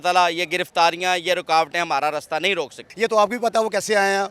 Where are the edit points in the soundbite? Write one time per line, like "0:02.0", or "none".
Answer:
0:02.8